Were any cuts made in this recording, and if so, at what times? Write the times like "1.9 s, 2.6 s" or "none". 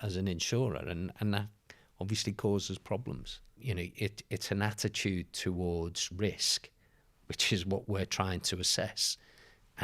3.5 s